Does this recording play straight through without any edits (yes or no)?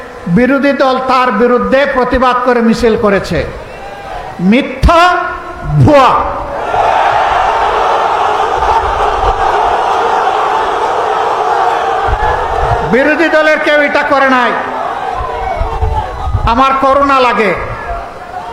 yes